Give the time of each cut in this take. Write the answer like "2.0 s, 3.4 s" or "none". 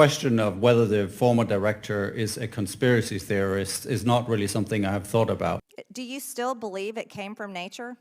5.6 s